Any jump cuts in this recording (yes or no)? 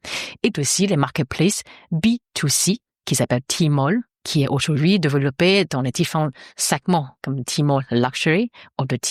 yes